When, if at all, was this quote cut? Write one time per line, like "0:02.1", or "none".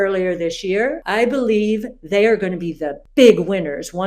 0:01.0